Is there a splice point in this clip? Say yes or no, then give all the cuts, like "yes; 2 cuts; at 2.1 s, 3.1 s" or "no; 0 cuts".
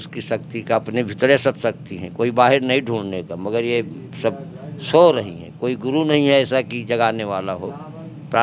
no; 0 cuts